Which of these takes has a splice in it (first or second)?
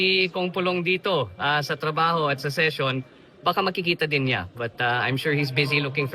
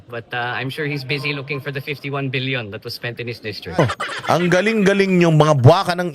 second